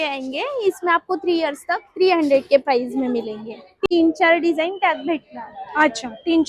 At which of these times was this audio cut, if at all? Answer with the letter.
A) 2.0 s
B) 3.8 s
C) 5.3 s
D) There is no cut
B